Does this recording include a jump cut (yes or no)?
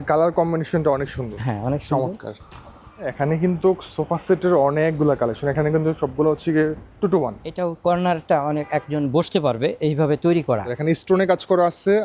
yes